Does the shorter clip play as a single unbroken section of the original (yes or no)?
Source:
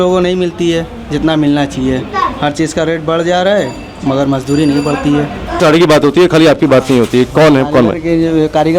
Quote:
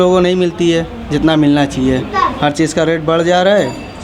yes